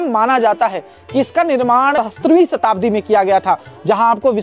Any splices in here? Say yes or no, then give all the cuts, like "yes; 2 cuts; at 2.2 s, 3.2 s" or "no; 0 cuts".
yes; 1 cut; at 1.9 s